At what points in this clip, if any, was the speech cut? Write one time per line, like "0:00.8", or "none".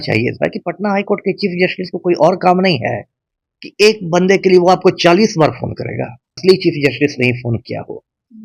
0:06.4